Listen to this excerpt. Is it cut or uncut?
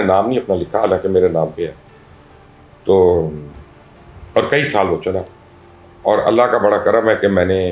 uncut